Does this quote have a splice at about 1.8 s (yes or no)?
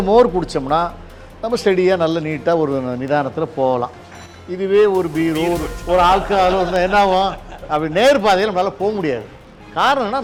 no